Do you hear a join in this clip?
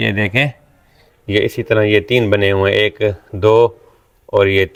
no; 0 cuts

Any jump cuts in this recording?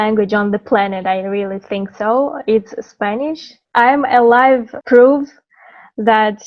yes; 2 cuts; at 3.5 s, 4.7 s

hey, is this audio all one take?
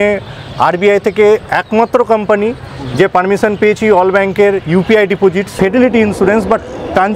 no; 1 cut; at 5.5 s

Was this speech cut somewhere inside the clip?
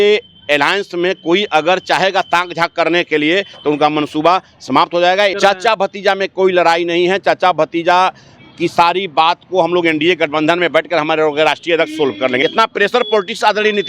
yes; 2 cuts; at 5.3 s, 12.4 s

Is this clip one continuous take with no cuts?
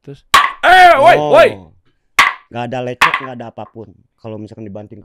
no; 2 cuts; at 2.4 s, 4.0 s

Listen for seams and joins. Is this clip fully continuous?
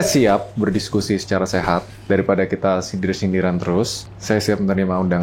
no; 1 cut; at 4.1 s

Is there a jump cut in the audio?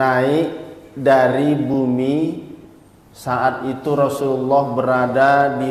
no; 0 cuts

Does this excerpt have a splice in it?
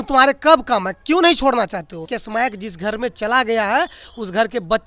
yes; 1 cut; at 2.2 s

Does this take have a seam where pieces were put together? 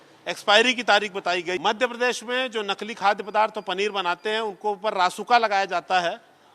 yes; 1 cut; at 1.6 s

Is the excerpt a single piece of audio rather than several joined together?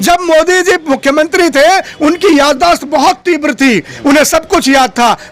yes; 0 cuts

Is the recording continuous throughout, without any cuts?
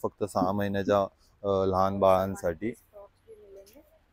yes; 0 cuts

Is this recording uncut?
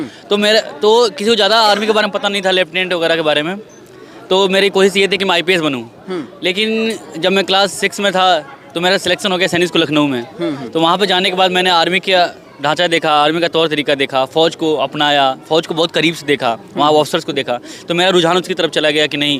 yes; 0 cuts

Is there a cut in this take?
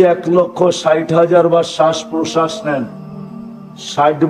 no; 0 cuts

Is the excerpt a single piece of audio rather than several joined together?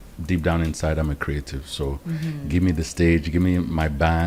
yes; 0 cuts

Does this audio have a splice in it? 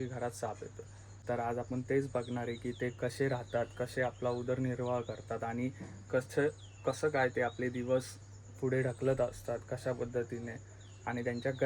yes; 1 cut; at 1.2 s

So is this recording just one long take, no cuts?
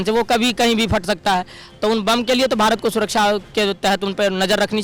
yes; 0 cuts

